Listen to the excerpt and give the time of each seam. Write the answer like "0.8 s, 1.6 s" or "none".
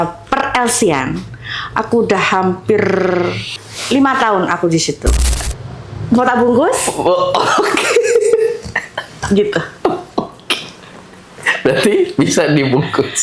3.4 s, 5.2 s